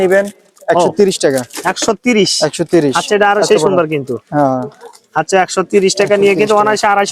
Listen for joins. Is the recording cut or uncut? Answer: uncut